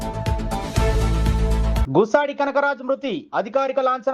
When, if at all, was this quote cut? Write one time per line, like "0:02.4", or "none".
0:01.8